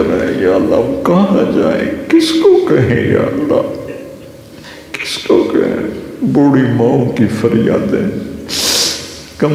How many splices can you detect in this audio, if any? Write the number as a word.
zero